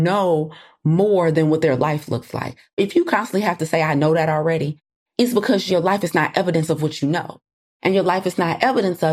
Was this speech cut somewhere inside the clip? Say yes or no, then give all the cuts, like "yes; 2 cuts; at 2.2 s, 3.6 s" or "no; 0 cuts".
yes; 1 cut; at 7.5 s